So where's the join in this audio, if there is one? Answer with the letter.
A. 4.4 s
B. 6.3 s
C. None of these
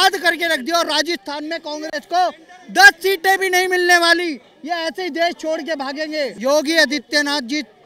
C